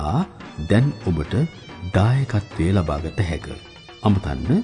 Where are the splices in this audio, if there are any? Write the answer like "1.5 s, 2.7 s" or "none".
none